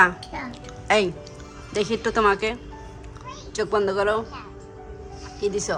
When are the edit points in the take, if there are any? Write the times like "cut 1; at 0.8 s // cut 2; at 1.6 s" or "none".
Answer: none